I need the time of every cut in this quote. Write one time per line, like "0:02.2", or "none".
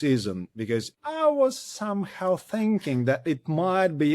0:01.0